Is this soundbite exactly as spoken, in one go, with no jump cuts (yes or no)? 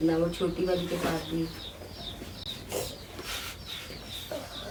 yes